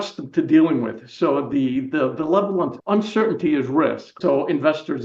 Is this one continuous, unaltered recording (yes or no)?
no